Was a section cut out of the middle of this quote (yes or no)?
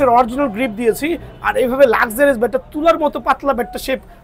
no